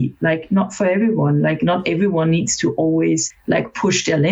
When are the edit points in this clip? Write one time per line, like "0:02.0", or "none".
0:03.3